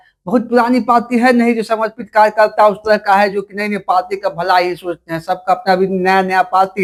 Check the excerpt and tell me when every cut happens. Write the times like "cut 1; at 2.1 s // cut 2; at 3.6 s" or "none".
none